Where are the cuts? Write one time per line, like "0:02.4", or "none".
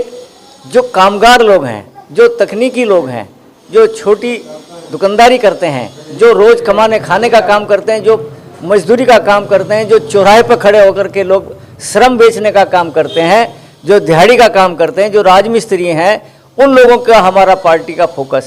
none